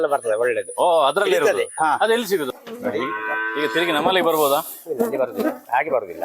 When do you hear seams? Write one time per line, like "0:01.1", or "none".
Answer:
0:02.5